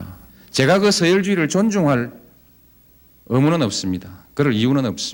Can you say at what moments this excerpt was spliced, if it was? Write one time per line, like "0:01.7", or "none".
none